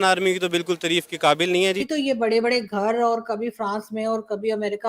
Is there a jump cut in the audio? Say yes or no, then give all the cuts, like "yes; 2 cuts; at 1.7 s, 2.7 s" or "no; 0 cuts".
yes; 1 cut; at 1.8 s